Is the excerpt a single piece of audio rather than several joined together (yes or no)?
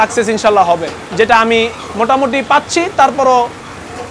yes